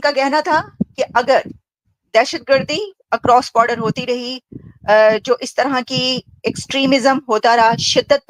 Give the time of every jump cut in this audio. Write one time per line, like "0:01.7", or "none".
none